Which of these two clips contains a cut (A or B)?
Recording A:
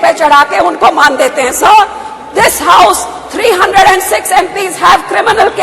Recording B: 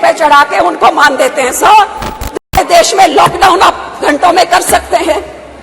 B